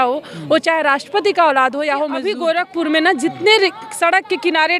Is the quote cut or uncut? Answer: cut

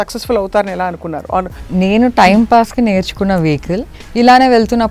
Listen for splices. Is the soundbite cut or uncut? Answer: cut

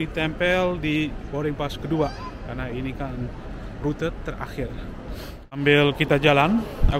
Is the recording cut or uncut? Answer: cut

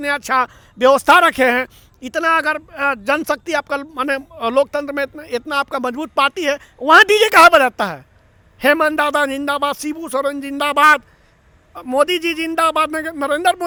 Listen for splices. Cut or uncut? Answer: uncut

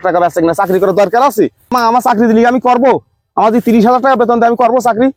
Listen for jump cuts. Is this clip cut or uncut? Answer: cut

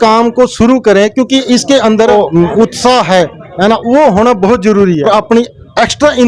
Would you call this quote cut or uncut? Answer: cut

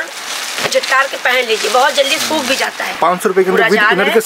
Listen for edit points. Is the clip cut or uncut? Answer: cut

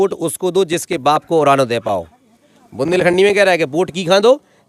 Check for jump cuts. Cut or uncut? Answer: uncut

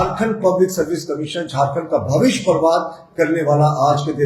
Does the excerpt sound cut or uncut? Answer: uncut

